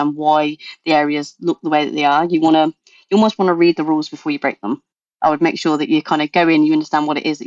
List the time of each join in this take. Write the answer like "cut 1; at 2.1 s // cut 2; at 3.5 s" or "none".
cut 1; at 5.0 s